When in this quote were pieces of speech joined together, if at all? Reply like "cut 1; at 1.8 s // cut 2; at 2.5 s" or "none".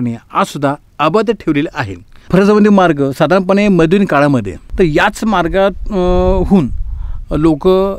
cut 1; at 2.3 s // cut 2; at 4.6 s

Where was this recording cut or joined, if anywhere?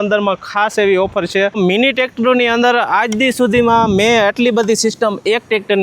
cut 1; at 1.5 s

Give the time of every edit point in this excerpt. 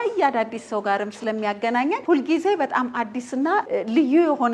cut 1; at 1.1 s // cut 2; at 2.0 s // cut 3; at 3.7 s

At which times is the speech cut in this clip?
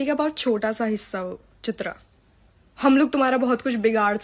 none

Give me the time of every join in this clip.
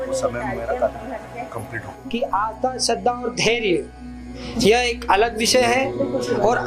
cut 1; at 1.9 s

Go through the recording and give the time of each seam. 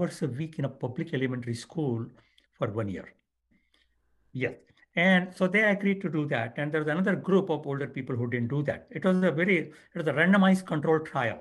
cut 1; at 3.6 s

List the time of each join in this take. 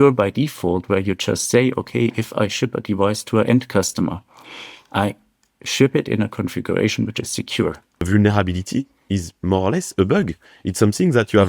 cut 1; at 8.1 s

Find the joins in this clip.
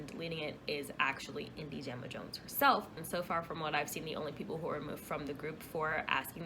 cut 1; at 3.0 s

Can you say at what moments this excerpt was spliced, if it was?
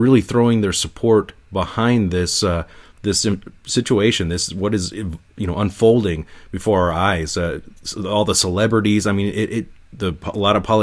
none

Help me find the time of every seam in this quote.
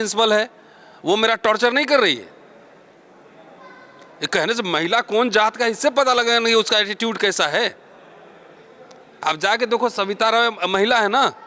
none

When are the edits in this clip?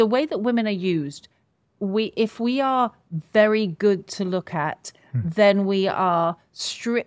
none

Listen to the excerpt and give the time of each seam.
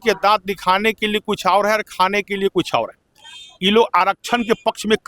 none

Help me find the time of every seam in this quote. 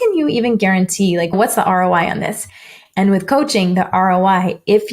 cut 1; at 1.3 s

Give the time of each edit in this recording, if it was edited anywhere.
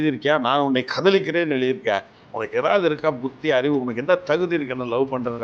none

